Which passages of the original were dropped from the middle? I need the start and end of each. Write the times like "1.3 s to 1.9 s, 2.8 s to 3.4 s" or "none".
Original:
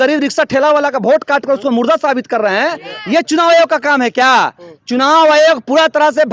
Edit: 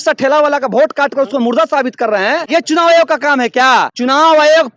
2.8 s to 3.1 s, 4.5 s to 4.8 s